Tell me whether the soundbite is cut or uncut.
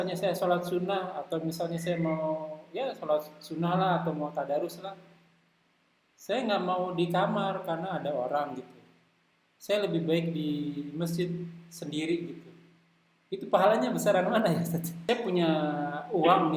cut